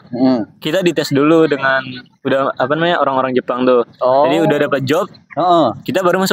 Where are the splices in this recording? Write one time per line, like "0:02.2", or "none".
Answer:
none

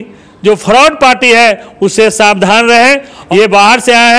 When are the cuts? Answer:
0:03.1

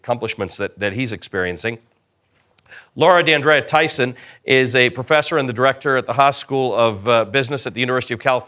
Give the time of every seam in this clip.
0:06.9

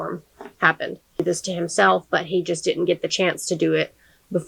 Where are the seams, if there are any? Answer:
0:01.2

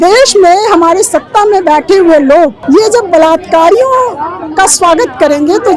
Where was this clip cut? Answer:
0:02.6

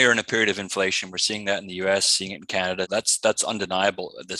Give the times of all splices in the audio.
0:02.9

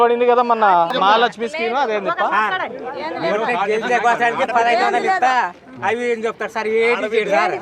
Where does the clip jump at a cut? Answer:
0:00.9

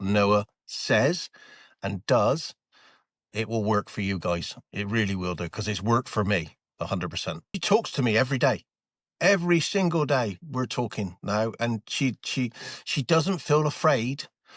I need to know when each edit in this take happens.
0:07.6

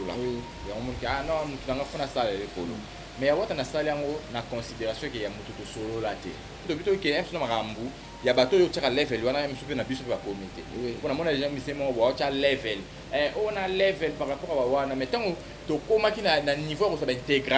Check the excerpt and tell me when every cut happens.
0:06.6

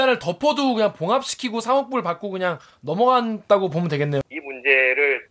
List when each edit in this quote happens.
0:04.2

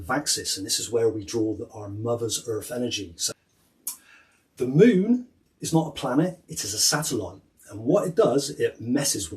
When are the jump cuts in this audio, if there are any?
0:03.2

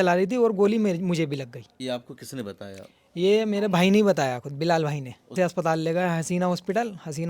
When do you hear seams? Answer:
0:01.6
0:05.3

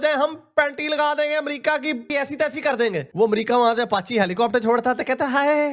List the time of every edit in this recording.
none

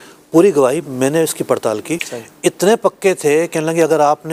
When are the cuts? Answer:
0:02.1

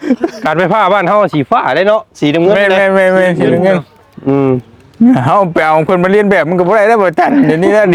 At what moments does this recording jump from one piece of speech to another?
none

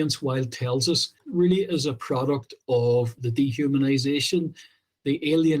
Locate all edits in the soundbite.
0:01.2
0:03.1

